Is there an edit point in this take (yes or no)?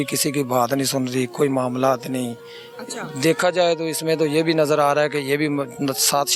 no